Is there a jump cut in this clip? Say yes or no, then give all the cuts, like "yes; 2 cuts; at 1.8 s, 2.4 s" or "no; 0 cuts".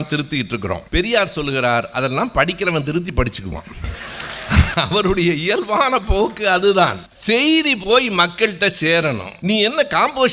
yes; 3 cuts; at 0.8 s, 7.1 s, 9.3 s